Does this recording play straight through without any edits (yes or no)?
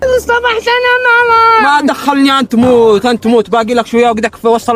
yes